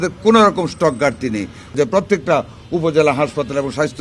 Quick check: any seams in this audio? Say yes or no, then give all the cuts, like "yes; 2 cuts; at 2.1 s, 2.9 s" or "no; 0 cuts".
yes; 1 cut; at 1.7 s